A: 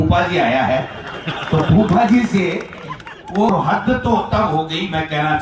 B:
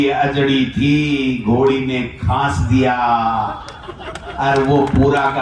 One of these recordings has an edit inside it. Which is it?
A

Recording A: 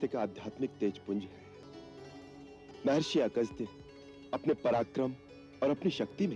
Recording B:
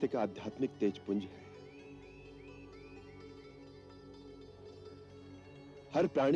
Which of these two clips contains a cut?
A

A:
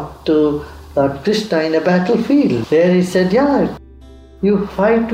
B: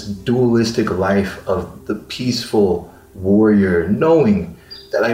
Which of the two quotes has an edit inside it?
A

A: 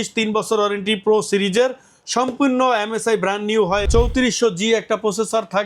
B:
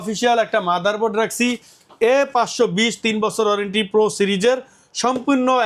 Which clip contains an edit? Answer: A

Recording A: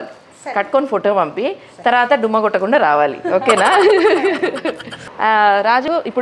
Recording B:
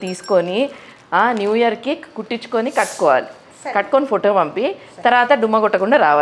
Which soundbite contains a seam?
A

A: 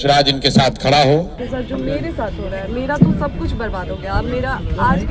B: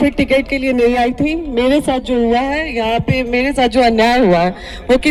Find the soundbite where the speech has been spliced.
A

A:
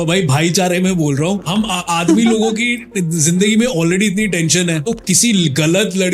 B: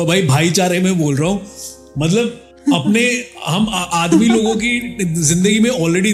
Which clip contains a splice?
A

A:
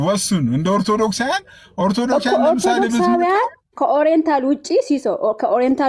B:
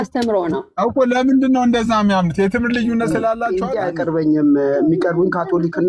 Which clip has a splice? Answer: B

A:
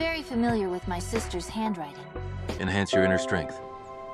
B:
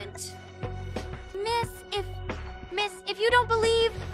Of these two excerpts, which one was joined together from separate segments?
A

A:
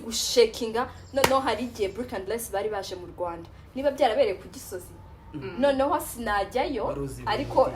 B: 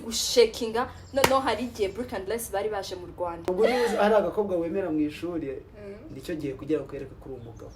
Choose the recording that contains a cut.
B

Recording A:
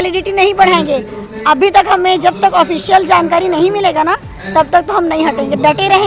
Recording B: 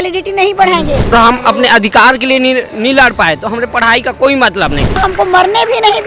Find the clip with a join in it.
B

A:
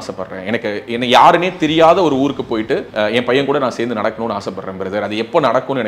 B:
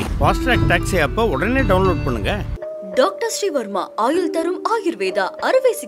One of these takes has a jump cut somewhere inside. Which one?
A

